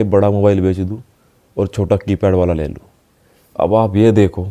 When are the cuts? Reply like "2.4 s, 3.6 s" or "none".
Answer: none